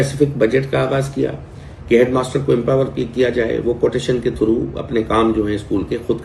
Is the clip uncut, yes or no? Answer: yes